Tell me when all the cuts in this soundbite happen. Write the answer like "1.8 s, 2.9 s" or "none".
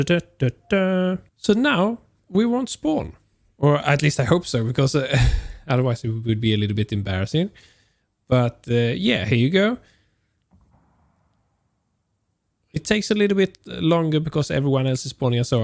1.3 s

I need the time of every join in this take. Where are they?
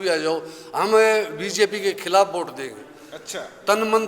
none

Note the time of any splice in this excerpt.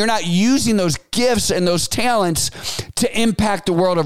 none

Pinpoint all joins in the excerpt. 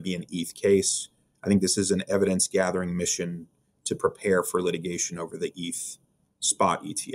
none

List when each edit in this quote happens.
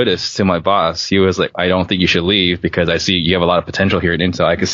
1.5 s

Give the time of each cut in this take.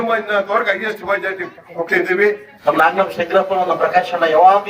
2.5 s

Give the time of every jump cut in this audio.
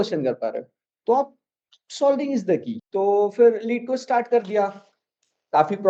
2.8 s

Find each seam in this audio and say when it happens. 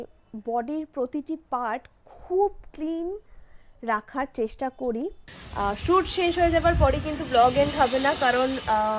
5.2 s

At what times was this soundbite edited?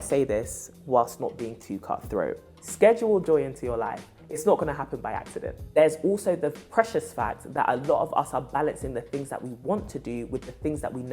2.5 s, 5.6 s

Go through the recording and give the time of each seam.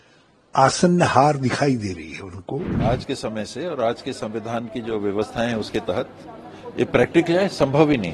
2.7 s

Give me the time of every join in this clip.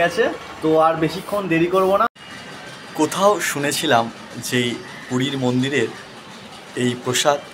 2.1 s

